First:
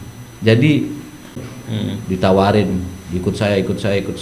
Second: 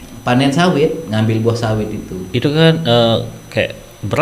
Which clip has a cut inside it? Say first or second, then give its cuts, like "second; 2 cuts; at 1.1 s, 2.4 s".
first; 1 cut; at 1.3 s